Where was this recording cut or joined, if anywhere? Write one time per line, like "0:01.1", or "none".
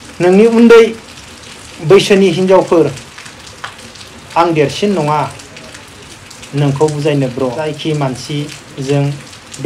0:07.8